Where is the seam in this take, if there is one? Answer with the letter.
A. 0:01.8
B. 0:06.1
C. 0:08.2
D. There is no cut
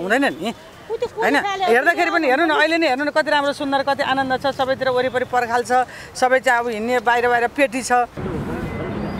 C